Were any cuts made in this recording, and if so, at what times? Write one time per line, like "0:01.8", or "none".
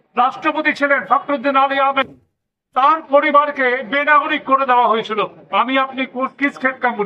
none